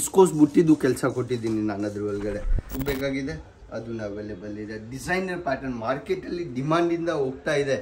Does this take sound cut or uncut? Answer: cut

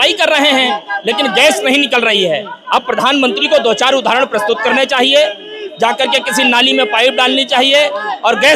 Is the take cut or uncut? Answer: uncut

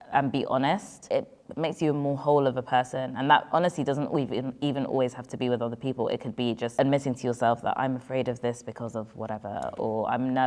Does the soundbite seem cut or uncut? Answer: cut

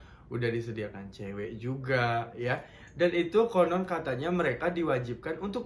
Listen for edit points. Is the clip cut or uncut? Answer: uncut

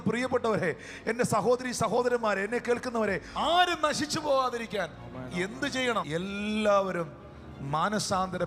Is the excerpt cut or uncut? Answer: cut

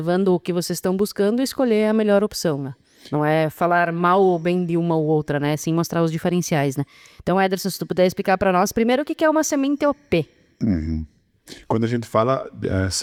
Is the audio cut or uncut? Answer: uncut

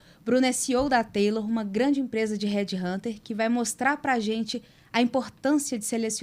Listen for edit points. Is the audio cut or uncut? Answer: uncut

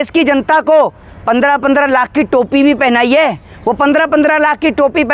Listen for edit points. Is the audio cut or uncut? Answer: uncut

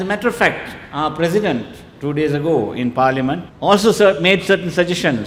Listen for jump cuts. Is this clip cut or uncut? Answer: uncut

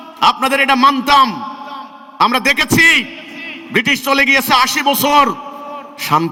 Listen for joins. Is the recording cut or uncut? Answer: uncut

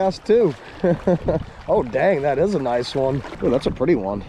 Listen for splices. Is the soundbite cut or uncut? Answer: cut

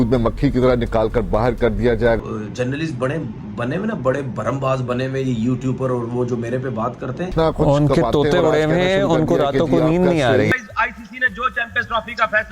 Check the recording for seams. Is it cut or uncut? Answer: cut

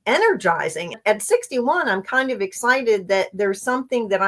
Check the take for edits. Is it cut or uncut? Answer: cut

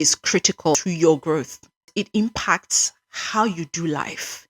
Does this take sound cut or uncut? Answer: cut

